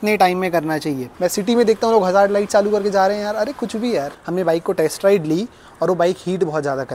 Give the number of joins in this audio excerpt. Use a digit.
2